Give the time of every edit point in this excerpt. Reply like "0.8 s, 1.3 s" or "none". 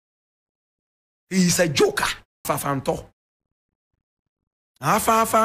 2.4 s

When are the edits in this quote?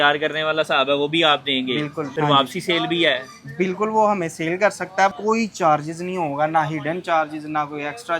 2.1 s, 5.1 s

